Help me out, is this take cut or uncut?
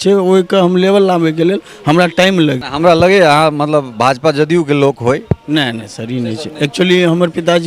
cut